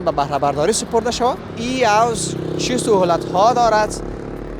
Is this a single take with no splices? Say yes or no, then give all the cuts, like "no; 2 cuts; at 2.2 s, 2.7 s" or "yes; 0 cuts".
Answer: no; 1 cut; at 1.5 s